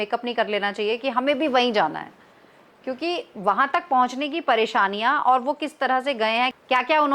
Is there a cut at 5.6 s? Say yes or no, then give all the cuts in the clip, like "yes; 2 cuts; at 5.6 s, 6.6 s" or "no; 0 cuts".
no; 0 cuts